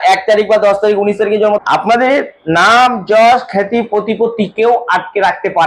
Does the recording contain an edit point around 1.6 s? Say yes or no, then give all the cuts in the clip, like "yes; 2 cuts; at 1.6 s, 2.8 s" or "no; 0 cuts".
yes; 1 cut; at 1.6 s